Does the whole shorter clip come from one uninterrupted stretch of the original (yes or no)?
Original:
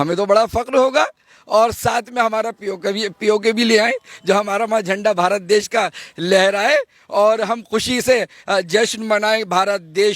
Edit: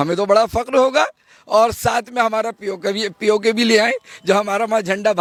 yes